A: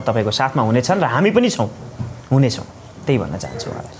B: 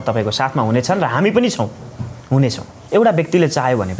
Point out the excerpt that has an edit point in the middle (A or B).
B